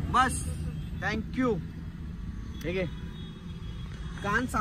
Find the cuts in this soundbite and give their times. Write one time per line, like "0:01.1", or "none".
none